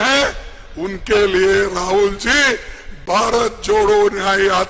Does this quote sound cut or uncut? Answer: uncut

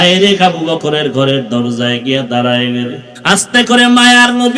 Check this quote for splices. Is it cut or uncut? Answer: cut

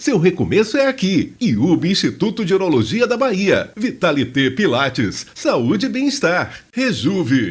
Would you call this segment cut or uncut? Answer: cut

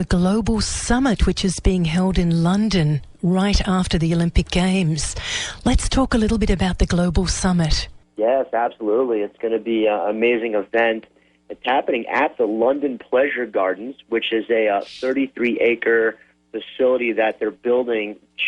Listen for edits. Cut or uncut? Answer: cut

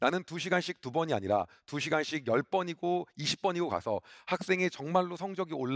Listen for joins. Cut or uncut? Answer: uncut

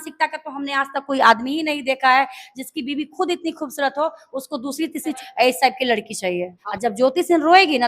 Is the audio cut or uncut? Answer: cut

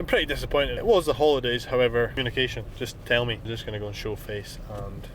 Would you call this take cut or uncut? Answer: cut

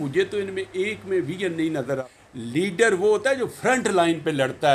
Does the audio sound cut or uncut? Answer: cut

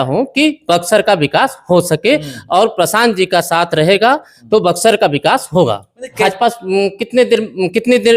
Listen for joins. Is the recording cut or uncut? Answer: cut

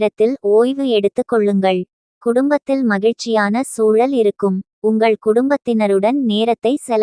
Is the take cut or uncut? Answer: uncut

